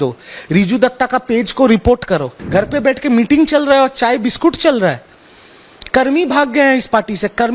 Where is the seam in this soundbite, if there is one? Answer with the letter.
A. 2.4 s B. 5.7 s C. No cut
A